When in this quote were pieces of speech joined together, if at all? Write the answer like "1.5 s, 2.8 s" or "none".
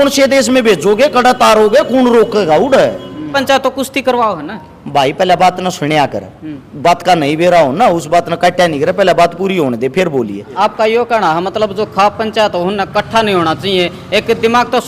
3.4 s, 10.5 s